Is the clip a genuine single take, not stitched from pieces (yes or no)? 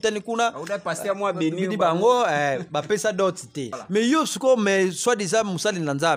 no